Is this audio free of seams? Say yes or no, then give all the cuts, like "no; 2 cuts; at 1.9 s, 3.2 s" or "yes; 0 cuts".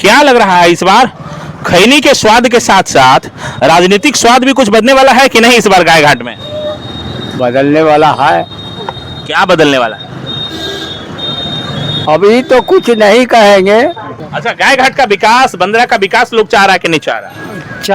no; 1 cut; at 14.3 s